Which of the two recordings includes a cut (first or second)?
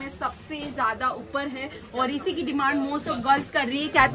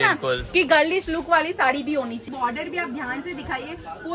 second